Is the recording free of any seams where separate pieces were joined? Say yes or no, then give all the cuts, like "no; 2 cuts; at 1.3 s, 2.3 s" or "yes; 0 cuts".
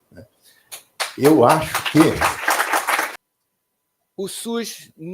no; 1 cut; at 3.1 s